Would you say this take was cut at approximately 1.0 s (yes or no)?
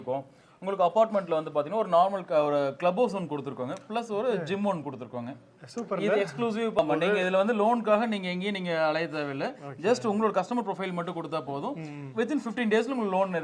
no